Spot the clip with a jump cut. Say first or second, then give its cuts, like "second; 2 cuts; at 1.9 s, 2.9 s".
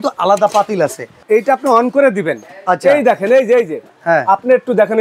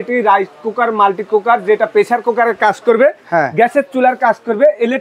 first; 2 cuts; at 1.2 s, 4.0 s